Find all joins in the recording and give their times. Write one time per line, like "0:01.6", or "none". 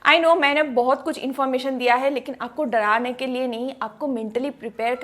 none